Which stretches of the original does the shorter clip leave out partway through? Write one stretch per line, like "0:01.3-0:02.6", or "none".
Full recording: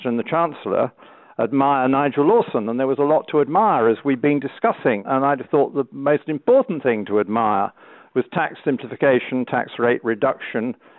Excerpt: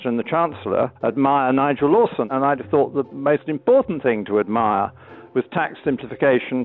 0:00.9-0:01.3
0:02.6-0:05.1